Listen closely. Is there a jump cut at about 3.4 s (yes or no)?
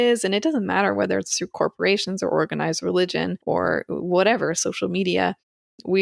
yes